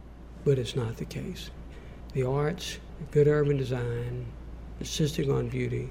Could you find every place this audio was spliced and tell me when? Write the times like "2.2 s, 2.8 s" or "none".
1.6 s